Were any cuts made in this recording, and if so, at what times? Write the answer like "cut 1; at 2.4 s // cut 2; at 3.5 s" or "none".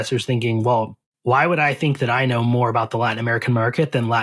cut 1; at 1.0 s